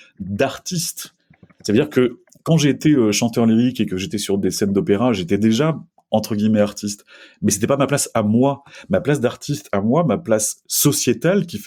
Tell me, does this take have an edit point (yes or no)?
no